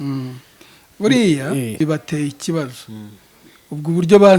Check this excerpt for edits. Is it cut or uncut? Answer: cut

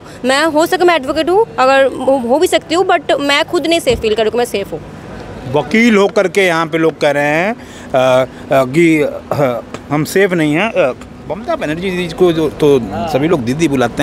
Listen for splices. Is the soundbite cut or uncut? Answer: uncut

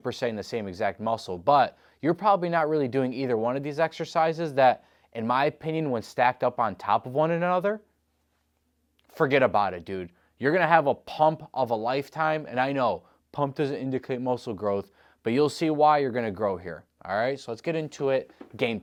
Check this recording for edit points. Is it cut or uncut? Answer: uncut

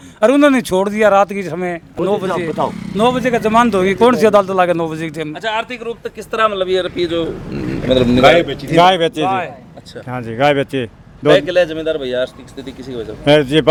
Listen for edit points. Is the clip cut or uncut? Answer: uncut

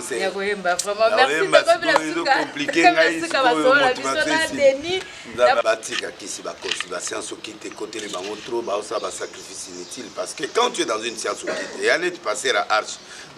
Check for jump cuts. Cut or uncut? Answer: cut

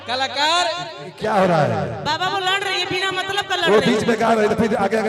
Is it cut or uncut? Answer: cut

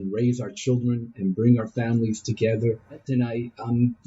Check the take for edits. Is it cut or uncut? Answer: cut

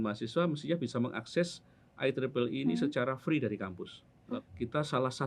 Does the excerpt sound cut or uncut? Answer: cut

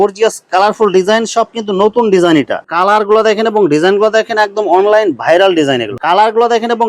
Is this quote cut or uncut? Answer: cut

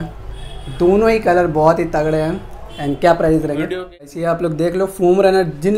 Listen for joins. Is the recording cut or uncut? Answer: cut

